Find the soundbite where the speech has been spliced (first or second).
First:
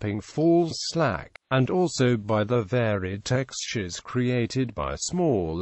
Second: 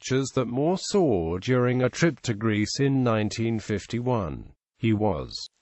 first